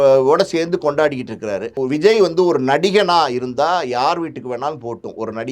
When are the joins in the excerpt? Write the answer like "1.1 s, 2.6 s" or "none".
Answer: 1.7 s